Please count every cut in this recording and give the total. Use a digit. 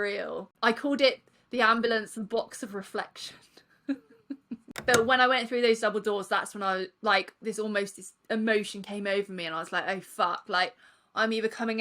1